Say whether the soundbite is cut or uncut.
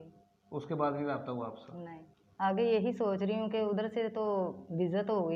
cut